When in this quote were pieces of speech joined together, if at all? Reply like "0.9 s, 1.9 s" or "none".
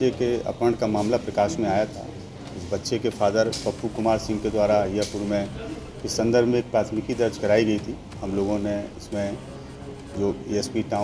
none